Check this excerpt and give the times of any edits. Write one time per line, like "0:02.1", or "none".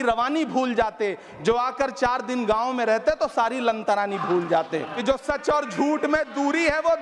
0:05.0